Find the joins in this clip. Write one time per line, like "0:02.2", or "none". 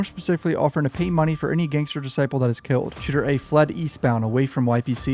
0:03.0